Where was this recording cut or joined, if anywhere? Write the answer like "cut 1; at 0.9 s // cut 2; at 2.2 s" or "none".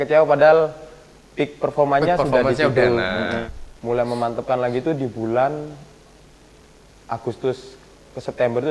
cut 1; at 3.5 s